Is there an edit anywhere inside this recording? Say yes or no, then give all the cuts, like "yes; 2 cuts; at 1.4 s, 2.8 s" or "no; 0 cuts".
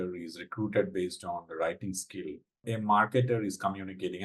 yes; 1 cut; at 2.6 s